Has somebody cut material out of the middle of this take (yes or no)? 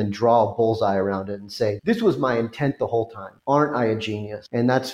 no